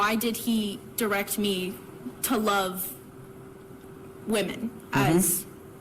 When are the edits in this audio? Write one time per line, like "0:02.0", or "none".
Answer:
0:02.5